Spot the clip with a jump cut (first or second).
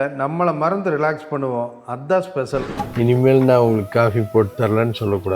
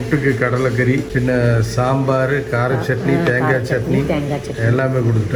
first